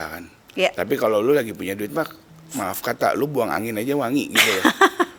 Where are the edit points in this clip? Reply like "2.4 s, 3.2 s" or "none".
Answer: none